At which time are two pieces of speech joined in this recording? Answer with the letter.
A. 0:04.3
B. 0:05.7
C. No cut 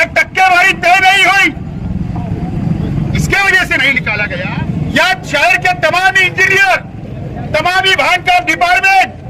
A